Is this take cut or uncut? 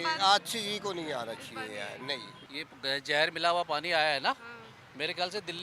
uncut